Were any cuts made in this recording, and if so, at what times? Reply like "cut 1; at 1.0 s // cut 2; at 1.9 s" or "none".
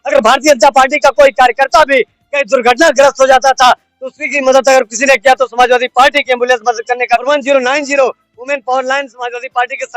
cut 1; at 7.2 s